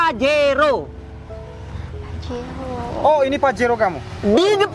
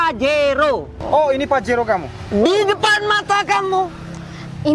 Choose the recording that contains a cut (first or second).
second